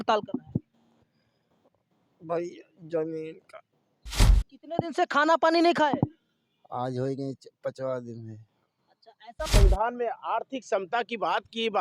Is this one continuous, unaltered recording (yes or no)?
no